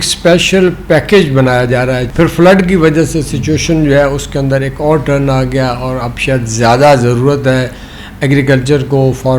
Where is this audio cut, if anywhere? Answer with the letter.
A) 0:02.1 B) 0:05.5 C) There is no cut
A